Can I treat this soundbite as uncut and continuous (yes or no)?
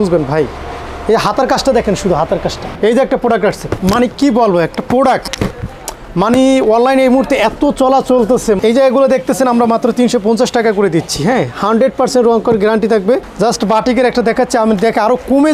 no